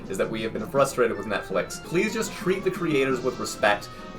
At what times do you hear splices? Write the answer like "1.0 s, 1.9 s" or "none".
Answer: 1.9 s